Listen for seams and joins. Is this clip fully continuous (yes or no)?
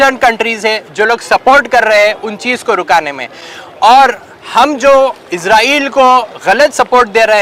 yes